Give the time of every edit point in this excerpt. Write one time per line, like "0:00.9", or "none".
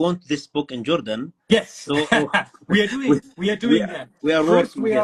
none

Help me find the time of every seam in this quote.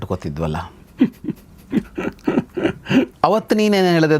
0:03.1

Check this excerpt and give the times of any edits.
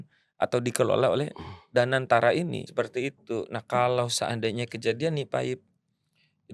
0:02.9

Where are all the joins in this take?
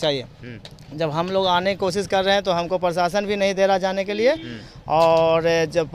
none

